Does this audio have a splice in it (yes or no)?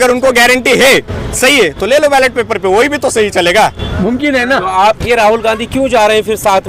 no